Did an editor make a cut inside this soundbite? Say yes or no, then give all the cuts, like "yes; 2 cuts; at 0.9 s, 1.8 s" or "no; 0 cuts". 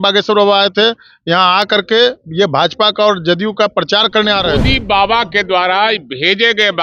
yes; 1 cut; at 4.6 s